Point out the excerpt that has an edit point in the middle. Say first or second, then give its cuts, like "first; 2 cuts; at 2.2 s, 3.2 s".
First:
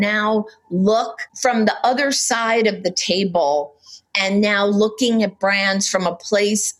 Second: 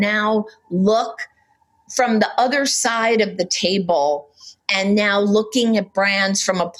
first; 1 cut; at 1.2 s